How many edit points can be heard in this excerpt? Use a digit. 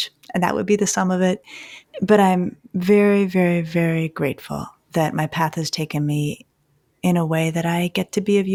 0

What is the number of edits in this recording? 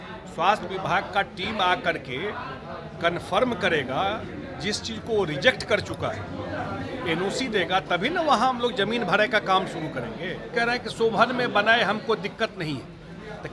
1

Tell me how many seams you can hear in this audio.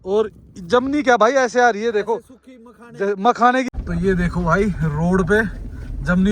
1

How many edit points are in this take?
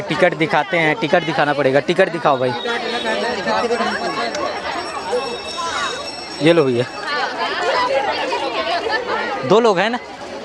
0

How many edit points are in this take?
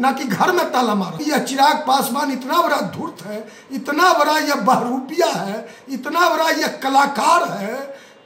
1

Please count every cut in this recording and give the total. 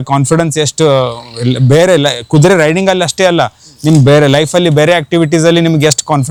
0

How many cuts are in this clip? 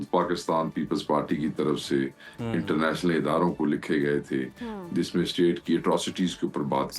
0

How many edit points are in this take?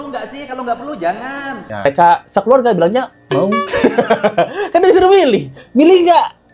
1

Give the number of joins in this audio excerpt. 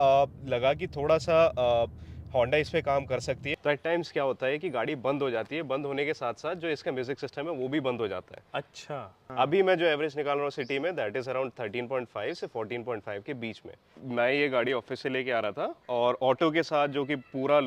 3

